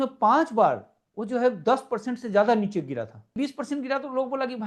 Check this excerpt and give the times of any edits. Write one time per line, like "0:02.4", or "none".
0:03.3